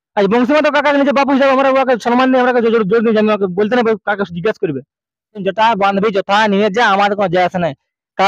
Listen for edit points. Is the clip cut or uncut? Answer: cut